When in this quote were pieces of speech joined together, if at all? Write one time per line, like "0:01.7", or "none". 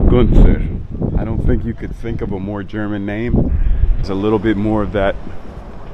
0:04.1

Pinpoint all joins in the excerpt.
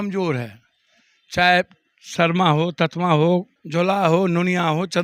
0:03.6

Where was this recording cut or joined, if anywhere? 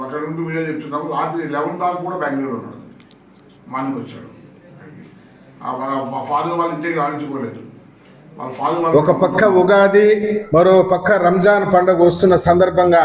0:08.9

